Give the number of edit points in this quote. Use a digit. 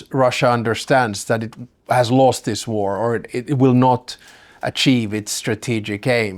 0